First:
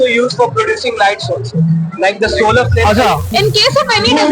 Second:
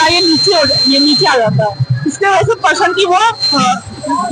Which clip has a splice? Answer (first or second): first